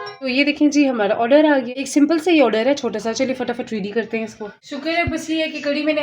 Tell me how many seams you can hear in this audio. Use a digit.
1